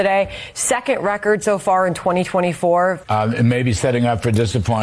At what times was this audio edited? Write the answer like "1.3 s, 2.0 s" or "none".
3.0 s